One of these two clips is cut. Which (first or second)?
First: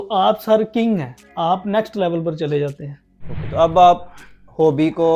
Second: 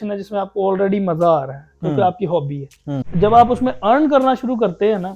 second